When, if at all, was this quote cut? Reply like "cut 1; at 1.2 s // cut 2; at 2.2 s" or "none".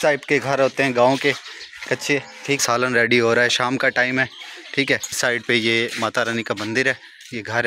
cut 1; at 2.6 s // cut 2; at 5.2 s